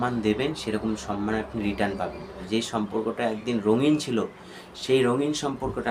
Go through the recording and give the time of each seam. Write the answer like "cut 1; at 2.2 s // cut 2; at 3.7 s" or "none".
cut 1; at 2.4 s